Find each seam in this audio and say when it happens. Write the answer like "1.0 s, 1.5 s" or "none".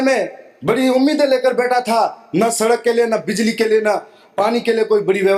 none